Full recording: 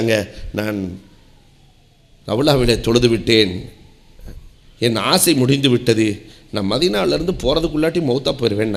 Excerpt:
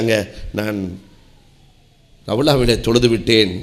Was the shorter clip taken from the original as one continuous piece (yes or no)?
yes